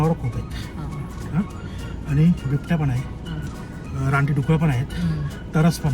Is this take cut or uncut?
uncut